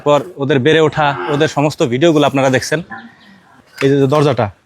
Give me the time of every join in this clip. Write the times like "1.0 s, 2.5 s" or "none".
3.6 s